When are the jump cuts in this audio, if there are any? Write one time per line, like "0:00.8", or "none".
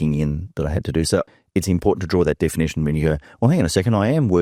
0:01.3

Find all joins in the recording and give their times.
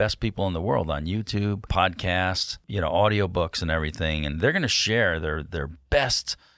0:01.7
0:02.5

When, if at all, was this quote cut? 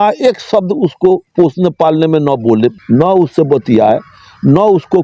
0:01.3
0:02.8

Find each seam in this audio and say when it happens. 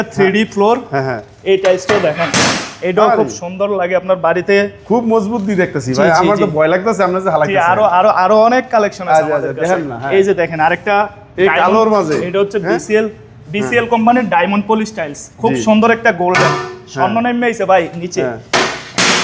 none

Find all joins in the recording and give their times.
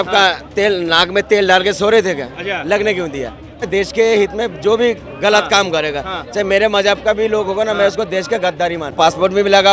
0:03.6
0:08.9

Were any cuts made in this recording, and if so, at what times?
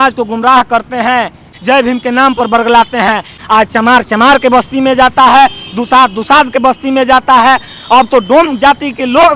0:01.4
0:03.3

